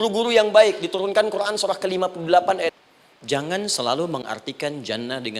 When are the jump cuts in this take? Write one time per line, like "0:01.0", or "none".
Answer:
0:02.9